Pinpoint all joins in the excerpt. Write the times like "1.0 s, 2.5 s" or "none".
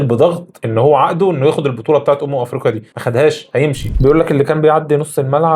3.8 s